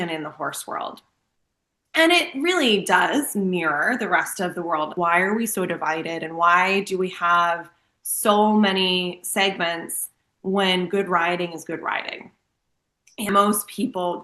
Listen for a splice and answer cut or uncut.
cut